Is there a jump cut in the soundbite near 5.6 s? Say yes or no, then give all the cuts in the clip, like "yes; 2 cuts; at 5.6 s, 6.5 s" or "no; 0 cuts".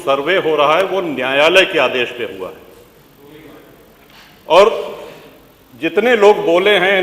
no; 0 cuts